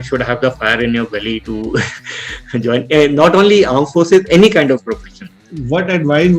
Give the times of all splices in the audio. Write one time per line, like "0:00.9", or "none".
none